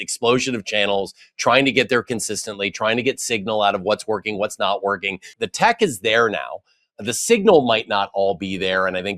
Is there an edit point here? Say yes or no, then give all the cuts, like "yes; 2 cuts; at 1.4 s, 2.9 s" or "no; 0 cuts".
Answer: yes; 1 cut; at 5.4 s